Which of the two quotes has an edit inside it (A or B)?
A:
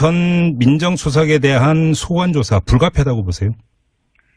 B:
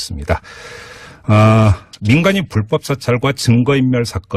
B